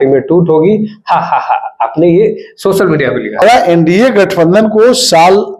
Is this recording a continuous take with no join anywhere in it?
no; 1 cut; at 3.4 s

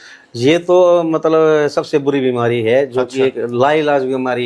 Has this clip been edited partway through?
no; 0 cuts

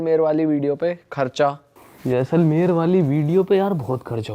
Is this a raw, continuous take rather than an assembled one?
yes; 0 cuts

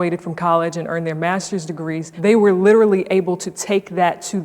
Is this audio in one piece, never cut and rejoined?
no; 1 cut; at 2.1 s

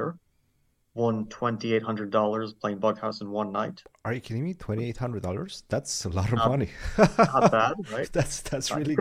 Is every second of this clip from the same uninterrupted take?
yes; 0 cuts

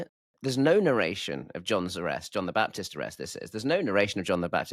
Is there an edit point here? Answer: no; 0 cuts

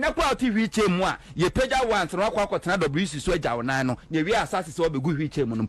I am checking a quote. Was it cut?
no; 0 cuts

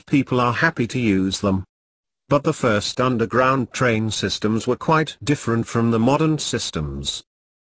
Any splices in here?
yes; 1 cut; at 1.0 s

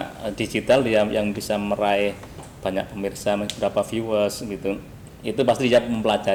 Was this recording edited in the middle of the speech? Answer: no; 0 cuts

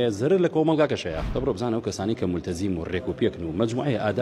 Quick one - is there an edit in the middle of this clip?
yes; 1 cut; at 1.2 s

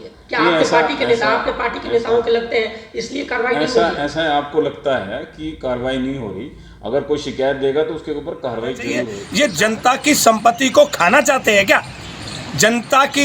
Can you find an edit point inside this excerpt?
yes; 1 cut; at 9.2 s

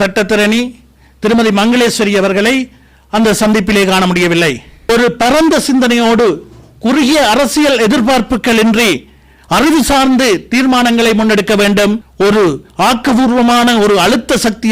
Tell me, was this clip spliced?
yes; 2 cuts; at 4.9 s, 12.1 s

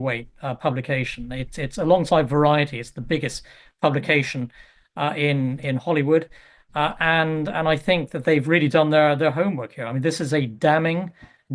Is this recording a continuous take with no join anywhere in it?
yes; 0 cuts

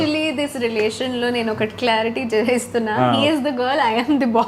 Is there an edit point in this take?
no; 0 cuts

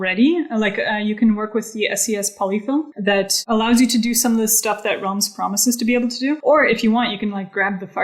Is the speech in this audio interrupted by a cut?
yes; 2 cuts; at 2.9 s, 6.4 s

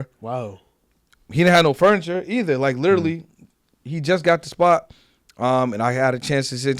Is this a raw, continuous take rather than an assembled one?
yes; 0 cuts

